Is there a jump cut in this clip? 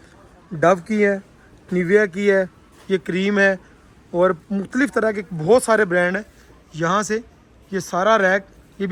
no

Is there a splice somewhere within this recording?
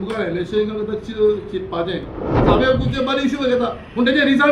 yes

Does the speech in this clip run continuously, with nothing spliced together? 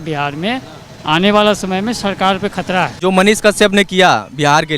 no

